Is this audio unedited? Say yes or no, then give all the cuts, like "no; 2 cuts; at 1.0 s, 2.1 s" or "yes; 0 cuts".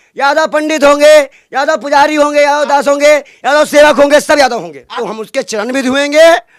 no; 1 cut; at 5.0 s